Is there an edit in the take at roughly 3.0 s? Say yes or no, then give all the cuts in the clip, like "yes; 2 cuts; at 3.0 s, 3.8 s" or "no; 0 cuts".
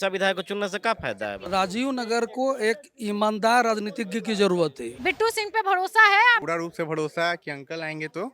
no; 3 cuts; at 1.5 s, 4.9 s, 6.4 s